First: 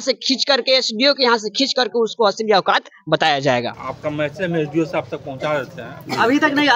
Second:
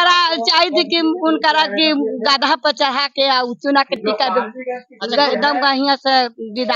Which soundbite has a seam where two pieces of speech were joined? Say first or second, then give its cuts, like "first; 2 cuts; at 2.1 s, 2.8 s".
first; 1 cut; at 3.8 s